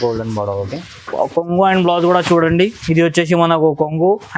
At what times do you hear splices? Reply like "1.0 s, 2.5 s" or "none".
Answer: none